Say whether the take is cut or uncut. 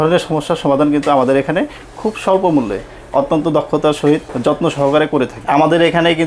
cut